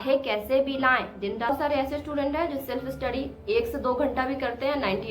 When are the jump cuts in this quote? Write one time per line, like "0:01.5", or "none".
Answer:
0:01.5